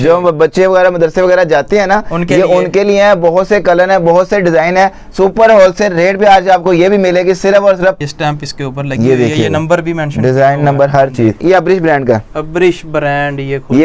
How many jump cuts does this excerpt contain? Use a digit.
2